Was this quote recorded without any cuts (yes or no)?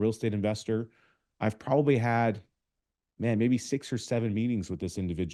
yes